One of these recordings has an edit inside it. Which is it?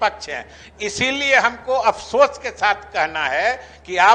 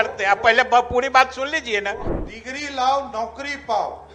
second; 1 cut; at 2.1 s

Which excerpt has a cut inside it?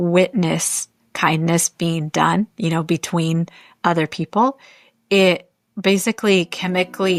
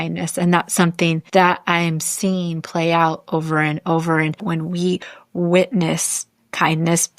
second; 2 cuts; at 1.2 s, 4.4 s

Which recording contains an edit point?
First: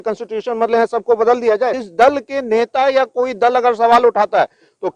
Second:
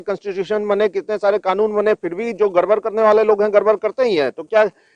first; 1 cut; at 1.8 s

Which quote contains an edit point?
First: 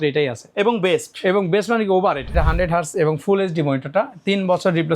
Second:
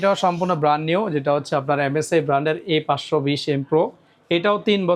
first; 1 cut; at 2.3 s

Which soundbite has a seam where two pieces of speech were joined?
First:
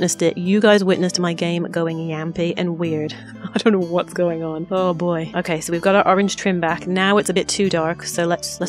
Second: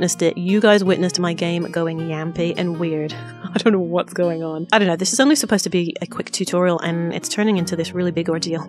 second; 1 cut; at 4.7 s

